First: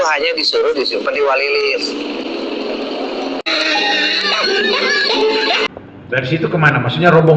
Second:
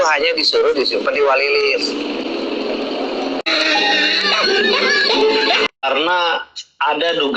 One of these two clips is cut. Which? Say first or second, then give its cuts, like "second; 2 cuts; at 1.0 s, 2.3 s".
first; 1 cut; at 5.8 s